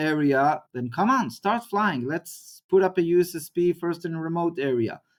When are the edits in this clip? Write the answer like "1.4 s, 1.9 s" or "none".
none